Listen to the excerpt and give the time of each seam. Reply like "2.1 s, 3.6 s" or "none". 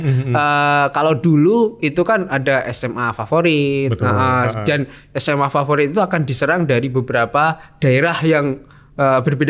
none